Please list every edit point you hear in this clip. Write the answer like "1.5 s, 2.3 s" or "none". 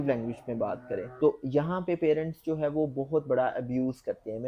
1.1 s